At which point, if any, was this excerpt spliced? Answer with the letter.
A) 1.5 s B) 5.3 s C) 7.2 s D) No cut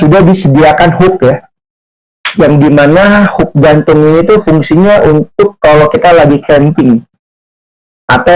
D